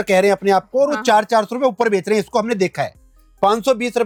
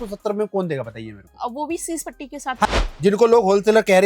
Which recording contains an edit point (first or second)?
second